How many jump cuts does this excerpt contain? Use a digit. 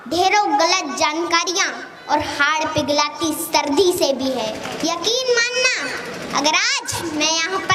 1